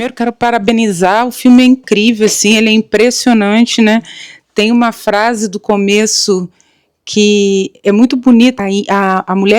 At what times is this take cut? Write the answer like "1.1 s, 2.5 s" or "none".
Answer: 8.6 s